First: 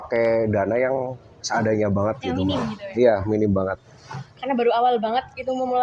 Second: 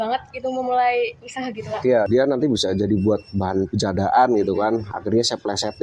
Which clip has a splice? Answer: second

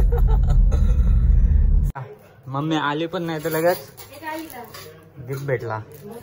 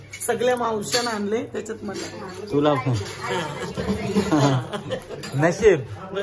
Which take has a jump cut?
first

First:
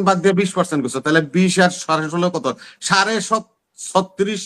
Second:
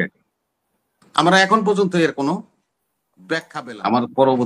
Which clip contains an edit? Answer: second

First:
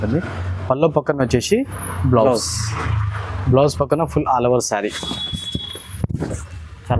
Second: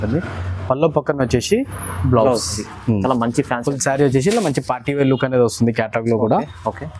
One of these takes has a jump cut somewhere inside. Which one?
second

